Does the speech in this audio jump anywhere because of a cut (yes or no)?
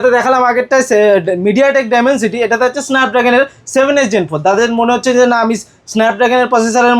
no